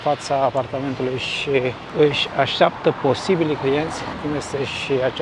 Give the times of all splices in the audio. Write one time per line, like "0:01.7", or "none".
none